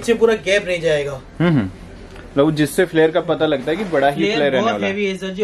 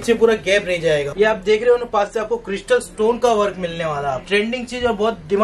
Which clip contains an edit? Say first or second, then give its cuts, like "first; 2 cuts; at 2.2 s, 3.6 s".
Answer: second; 2 cuts; at 1.1 s, 4.2 s